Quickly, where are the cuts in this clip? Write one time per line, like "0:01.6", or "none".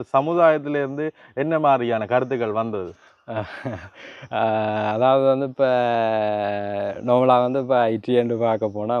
none